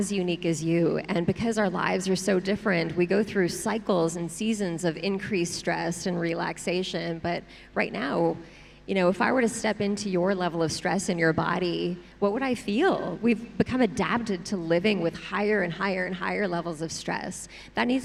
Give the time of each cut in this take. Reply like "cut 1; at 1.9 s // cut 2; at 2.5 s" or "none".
none